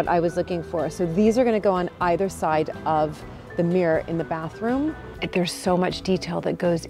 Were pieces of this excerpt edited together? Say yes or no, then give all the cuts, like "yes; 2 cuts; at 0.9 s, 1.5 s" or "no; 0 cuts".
yes; 1 cut; at 5.1 s